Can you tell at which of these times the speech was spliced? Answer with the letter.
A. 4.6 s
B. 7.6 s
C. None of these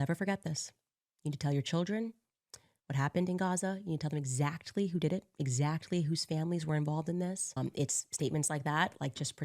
B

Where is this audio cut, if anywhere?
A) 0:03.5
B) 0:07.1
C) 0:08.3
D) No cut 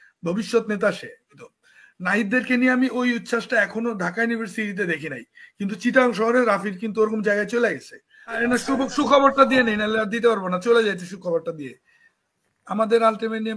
C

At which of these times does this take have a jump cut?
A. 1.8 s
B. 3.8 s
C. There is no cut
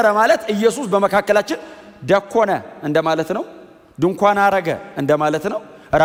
C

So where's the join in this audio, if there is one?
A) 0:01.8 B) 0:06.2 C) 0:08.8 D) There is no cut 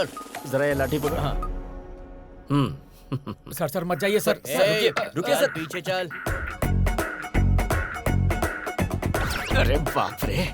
B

